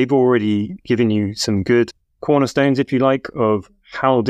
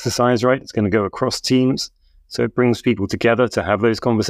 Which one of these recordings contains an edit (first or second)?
first